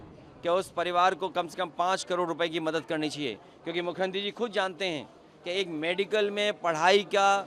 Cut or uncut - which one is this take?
uncut